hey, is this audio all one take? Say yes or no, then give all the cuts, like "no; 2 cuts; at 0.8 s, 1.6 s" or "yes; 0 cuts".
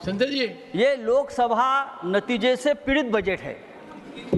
yes; 0 cuts